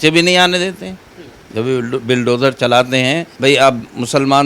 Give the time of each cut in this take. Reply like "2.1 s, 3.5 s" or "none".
3.3 s